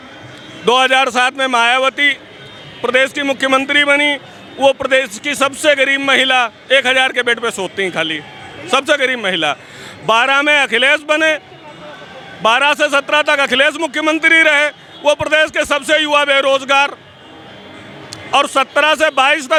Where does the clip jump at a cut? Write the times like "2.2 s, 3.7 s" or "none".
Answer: none